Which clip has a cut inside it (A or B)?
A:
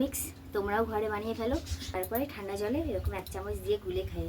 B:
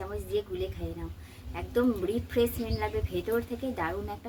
A